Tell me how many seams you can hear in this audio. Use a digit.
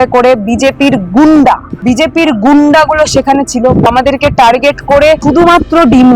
3